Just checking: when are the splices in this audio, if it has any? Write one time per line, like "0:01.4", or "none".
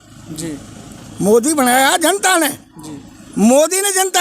0:01.0